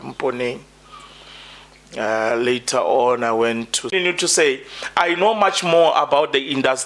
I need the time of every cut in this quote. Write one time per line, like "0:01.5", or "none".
0:03.9